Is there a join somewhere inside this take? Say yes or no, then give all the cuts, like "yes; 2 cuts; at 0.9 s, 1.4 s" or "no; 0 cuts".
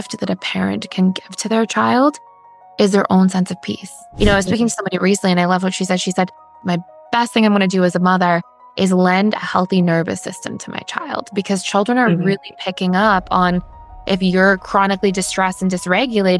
yes; 2 cuts; at 4.0 s, 6.6 s